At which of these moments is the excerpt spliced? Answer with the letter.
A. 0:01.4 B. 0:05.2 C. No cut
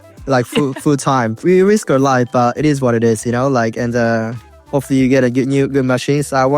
A